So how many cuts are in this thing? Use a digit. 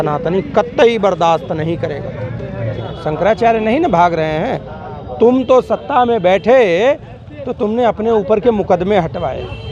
1